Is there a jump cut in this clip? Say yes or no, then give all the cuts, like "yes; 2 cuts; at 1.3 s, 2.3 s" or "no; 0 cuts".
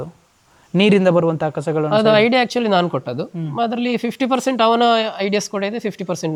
no; 0 cuts